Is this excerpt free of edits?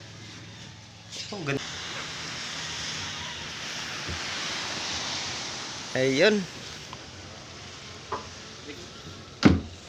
no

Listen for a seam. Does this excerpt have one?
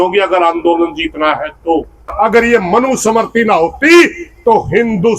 yes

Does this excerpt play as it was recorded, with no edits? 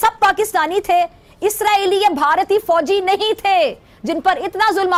yes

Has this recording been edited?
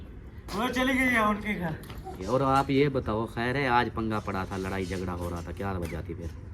yes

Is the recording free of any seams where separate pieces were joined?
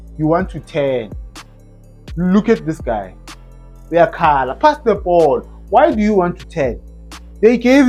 yes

